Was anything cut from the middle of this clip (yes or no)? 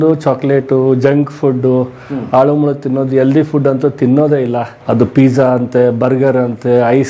no